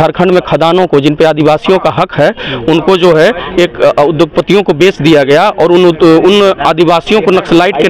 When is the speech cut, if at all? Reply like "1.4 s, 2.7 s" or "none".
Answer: none

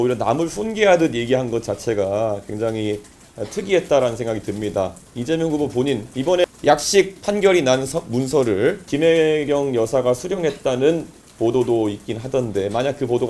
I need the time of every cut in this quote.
6.4 s, 8.9 s

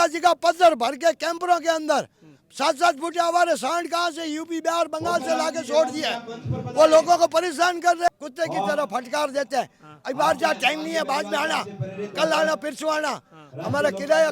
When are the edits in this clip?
8.1 s

